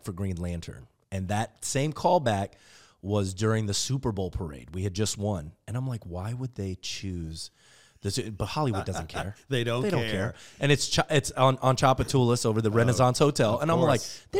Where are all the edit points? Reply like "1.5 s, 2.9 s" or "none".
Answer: none